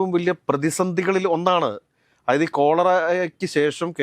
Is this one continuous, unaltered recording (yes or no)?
yes